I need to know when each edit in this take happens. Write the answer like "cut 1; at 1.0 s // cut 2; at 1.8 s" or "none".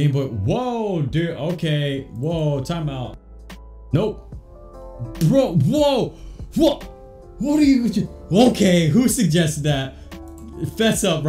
cut 1; at 3.0 s